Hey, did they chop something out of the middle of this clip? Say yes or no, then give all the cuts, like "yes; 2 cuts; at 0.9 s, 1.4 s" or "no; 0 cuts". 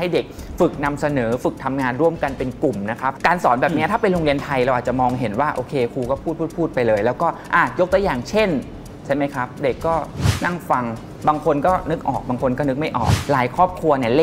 yes; 2 cuts; at 3.1 s, 13.2 s